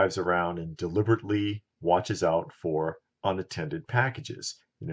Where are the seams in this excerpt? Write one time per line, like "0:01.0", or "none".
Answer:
none